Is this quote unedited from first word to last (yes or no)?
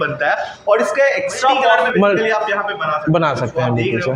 no